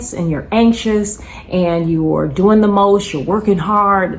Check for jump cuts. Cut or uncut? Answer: uncut